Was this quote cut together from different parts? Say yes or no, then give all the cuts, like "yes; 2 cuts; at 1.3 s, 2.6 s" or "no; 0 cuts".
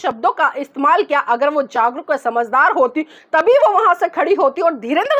no; 0 cuts